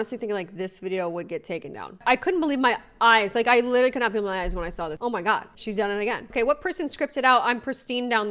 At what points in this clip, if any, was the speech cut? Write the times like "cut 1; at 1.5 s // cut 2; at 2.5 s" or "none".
cut 1; at 1.9 s // cut 2; at 4.9 s // cut 3; at 6.2 s